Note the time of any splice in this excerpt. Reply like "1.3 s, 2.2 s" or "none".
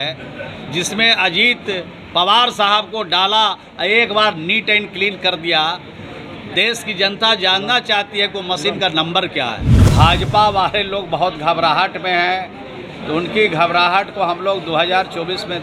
9.7 s